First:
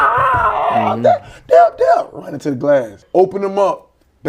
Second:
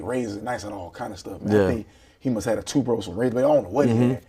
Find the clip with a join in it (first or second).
first